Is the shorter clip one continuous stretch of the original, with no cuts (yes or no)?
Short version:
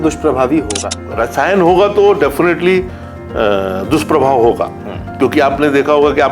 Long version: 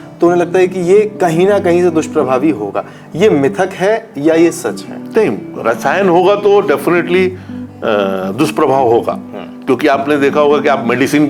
no